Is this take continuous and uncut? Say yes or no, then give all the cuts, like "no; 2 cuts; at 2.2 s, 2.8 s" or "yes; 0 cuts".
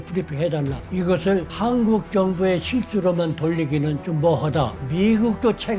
no; 4 cuts; at 0.8 s, 1.5 s, 4.0 s, 4.8 s